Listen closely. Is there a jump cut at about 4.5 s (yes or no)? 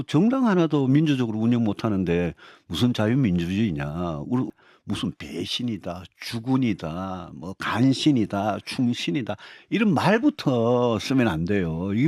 yes